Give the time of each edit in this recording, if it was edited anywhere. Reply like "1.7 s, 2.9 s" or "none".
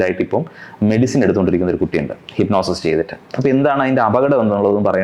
none